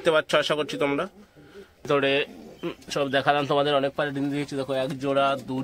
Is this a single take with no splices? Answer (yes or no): no